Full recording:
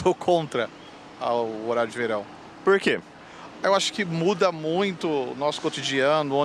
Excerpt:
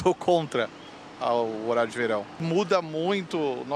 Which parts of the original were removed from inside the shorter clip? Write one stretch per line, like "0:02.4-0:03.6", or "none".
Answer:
0:02.4-0:04.1